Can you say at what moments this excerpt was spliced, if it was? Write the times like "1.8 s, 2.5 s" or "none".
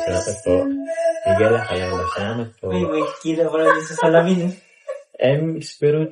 none